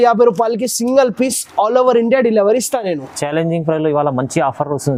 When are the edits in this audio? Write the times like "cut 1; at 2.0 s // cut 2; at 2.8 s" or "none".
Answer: none